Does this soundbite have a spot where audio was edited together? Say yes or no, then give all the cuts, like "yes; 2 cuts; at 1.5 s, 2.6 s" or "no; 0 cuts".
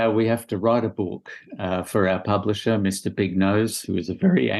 no; 0 cuts